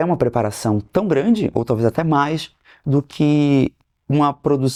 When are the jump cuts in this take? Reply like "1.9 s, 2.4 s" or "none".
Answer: none

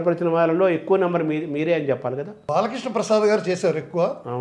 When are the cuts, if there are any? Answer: 2.4 s

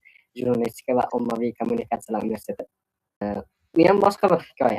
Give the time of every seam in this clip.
1.6 s, 3.2 s

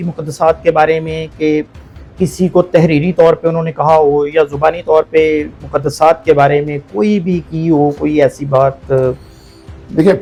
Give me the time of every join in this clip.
none

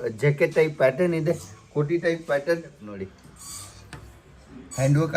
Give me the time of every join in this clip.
2.9 s

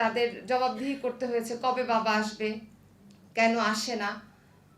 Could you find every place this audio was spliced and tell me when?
none

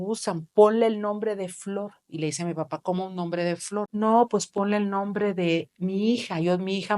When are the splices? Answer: 3.9 s

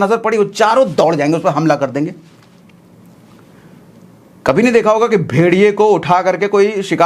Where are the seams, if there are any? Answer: none

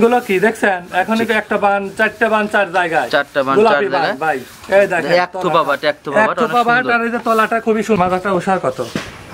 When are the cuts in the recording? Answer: 8.0 s

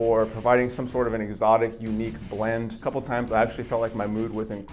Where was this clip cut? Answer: 2.8 s

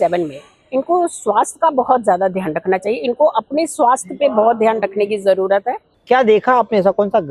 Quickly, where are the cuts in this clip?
5.9 s

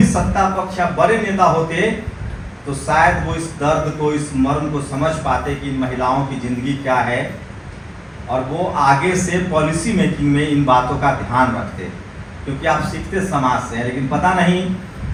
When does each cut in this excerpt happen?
none

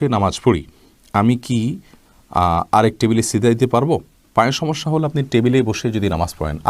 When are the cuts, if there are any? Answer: none

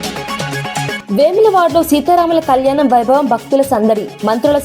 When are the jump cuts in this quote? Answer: 0.9 s

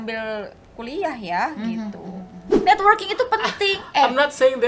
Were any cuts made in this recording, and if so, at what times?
2.5 s

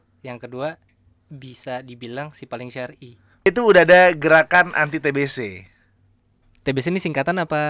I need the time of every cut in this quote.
3.5 s

